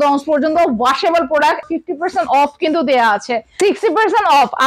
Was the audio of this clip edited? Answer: yes; 2 cuts; at 1.6 s, 3.4 s

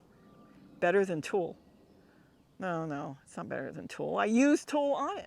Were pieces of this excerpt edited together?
no; 0 cuts

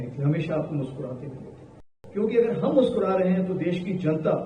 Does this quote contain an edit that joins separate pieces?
yes; 1 cut; at 1.9 s

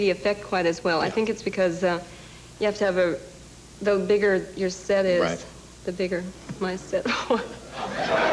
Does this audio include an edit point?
no; 0 cuts

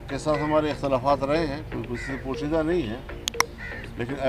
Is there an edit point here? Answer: no; 0 cuts

